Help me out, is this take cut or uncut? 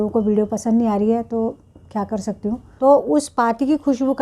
cut